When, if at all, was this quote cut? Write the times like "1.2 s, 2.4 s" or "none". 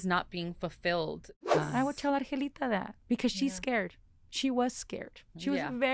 1.4 s